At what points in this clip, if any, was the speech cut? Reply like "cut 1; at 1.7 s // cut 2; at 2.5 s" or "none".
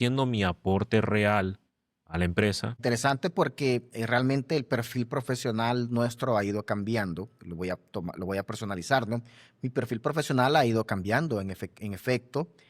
cut 1; at 2.8 s

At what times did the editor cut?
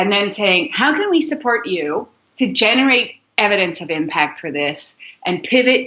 none

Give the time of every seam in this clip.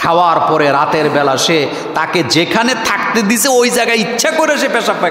none

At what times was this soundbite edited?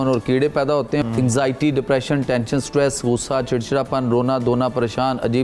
cut 1; at 1.0 s

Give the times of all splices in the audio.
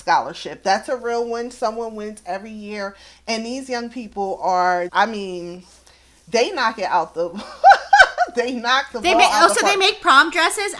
cut 1; at 4.9 s

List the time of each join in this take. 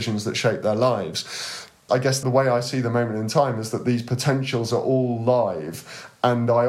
cut 1; at 2.2 s

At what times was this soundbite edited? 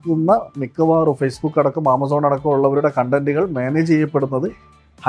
none

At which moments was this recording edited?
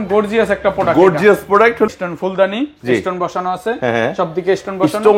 cut 1; at 1.9 s

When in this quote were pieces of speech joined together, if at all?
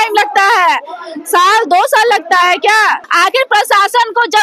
cut 1; at 3.1 s

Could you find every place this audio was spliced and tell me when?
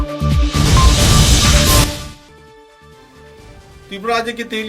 cut 1; at 3.0 s

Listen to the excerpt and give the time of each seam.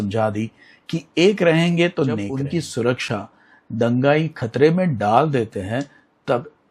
cut 1; at 2.3 s

